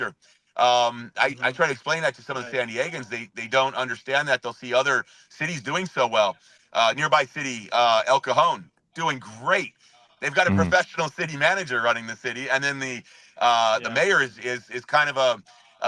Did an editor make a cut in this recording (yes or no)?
no